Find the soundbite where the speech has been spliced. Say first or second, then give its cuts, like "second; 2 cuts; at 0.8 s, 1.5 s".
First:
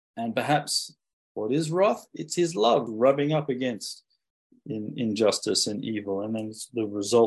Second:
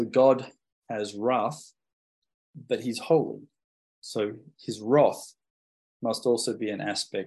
first; 2 cuts; at 0.9 s, 2.9 s